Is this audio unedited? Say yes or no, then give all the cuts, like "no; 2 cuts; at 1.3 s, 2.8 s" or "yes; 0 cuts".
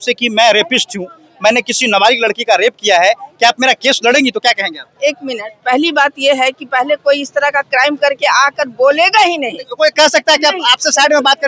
yes; 0 cuts